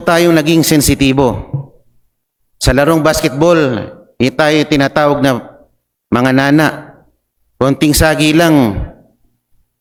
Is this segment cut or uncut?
uncut